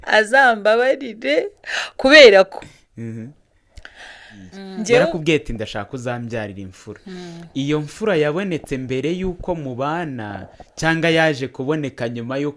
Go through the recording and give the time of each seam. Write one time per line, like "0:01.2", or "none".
0:05.1